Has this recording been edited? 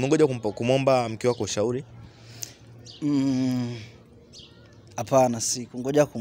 no; 0 cuts

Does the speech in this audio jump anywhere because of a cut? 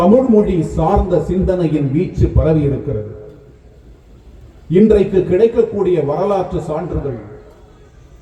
no; 0 cuts

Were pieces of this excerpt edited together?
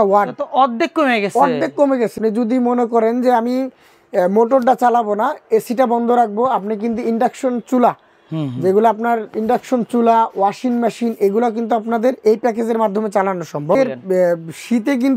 yes; 2 cuts; at 2.2 s, 13.8 s

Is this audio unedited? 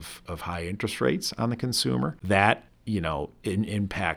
no; 2 cuts; at 2.2 s, 2.7 s

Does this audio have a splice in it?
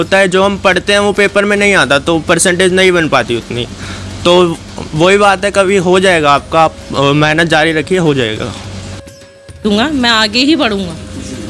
yes; 1 cut; at 9.5 s

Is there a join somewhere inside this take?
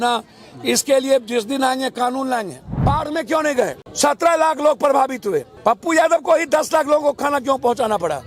yes; 3 cuts; at 2.6 s, 3.8 s, 5.5 s

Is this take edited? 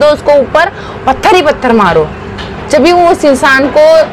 no; 0 cuts

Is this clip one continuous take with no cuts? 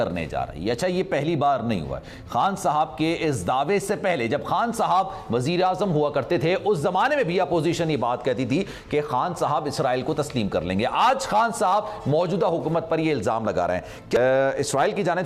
yes; 0 cuts

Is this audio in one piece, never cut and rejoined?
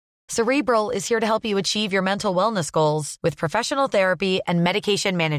yes; 0 cuts

